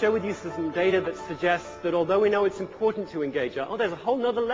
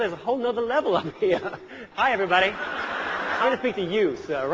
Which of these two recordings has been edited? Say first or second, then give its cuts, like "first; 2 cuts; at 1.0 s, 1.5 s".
second; 2 cuts; at 1.8 s, 3.3 s